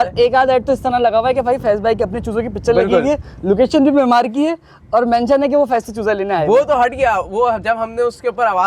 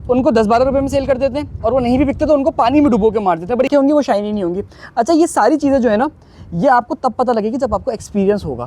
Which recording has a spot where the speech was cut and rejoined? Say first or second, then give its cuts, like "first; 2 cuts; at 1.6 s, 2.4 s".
second; 1 cut; at 3.7 s